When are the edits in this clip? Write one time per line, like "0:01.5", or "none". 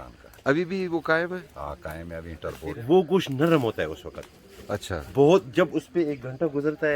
0:02.8

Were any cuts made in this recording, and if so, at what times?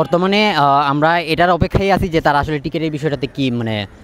none

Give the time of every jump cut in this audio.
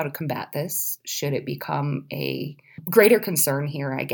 0:02.8

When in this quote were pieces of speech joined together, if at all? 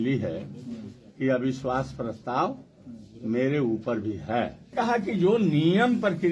0:04.6

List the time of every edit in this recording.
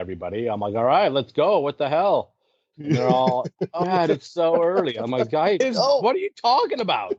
none

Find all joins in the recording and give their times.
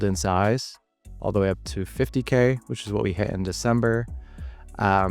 none

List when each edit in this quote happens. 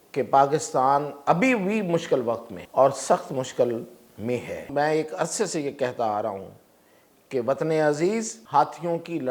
0:02.5
0:04.7
0:08.4

